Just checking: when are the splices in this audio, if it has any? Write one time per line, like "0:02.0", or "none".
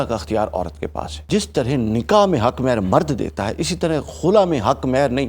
0:01.1